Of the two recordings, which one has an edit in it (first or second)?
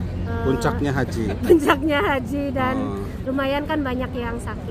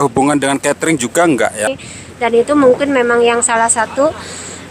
second